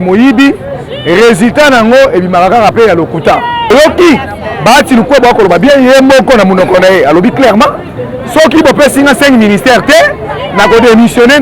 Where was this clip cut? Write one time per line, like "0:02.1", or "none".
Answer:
0:03.7